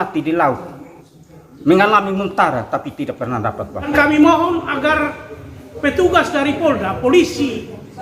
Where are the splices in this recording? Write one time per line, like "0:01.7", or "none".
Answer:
0:03.9